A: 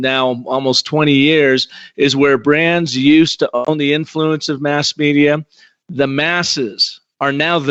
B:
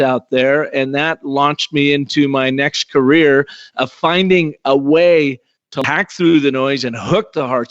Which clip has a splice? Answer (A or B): B